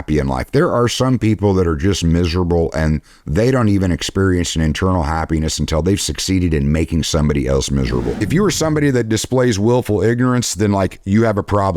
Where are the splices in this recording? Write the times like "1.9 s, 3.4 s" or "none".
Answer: 8.2 s

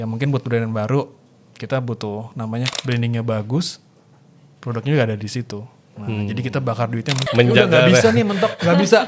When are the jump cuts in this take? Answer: 2.7 s, 7.2 s

